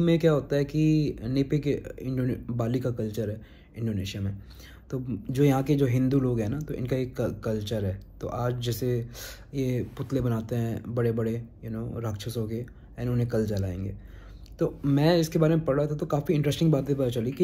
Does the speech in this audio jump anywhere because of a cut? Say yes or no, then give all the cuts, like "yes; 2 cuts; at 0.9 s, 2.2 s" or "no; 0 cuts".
no; 0 cuts